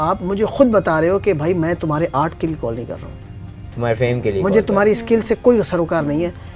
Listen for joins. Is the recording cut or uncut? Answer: uncut